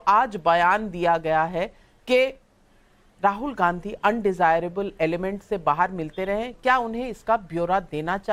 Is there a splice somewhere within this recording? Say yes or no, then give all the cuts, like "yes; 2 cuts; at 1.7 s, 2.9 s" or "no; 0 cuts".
no; 0 cuts